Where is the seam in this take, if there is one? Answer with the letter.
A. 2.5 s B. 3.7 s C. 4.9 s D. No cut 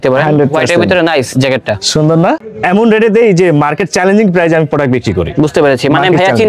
A